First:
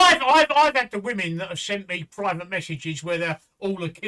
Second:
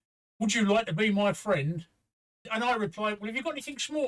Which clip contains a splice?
second; 1 cut; at 2.5 s

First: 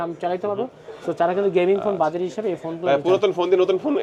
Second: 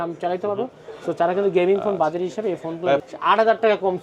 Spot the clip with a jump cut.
second; 1 cut; at 3.0 s

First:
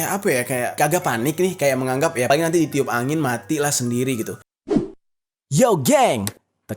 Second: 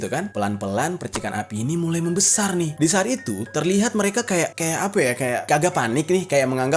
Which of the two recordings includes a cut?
first; 1 cut; at 4.5 s

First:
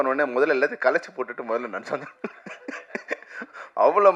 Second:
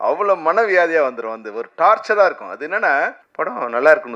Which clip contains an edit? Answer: second; 1 cut; at 3.2 s

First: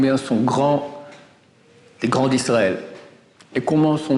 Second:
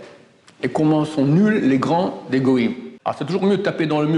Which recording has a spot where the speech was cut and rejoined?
second; 1 cut; at 2.9 s

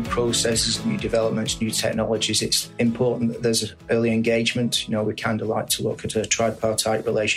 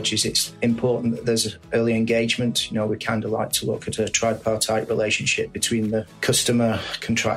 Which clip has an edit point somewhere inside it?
second; 1 cut; at 6.1 s

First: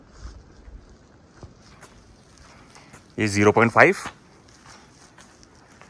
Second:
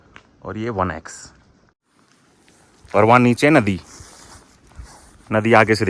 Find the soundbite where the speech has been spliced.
second; 1 cut; at 1.8 s

